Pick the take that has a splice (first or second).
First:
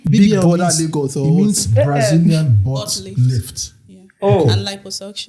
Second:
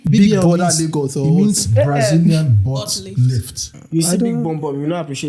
second